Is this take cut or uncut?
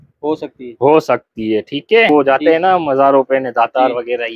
cut